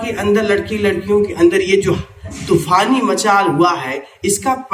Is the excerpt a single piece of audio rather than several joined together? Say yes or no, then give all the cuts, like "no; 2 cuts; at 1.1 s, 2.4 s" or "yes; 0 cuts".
yes; 0 cuts